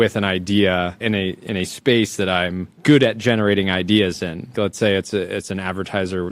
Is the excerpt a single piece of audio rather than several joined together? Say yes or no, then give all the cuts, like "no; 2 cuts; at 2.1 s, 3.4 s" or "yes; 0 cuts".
no; 3 cuts; at 1.0 s, 2.7 s, 4.5 s